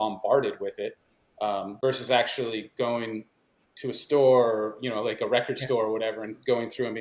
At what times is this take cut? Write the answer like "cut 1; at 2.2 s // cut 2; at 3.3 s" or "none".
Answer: cut 1; at 1.7 s